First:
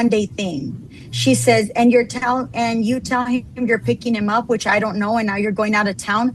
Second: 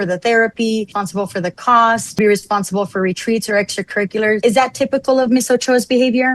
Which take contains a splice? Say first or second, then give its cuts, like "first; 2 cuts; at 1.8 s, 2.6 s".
second; 3 cuts; at 0.9 s, 2.2 s, 4.4 s